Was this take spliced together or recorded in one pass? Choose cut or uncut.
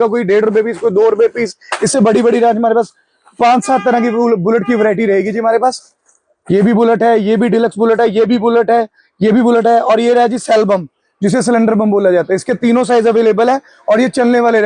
uncut